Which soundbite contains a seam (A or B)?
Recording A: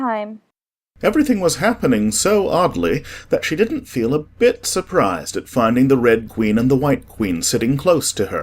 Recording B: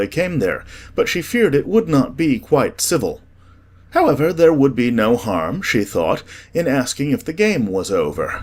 A